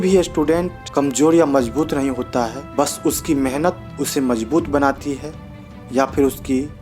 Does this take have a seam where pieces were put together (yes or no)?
no